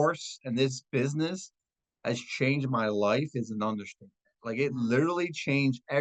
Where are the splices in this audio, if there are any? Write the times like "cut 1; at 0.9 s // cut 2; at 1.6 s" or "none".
none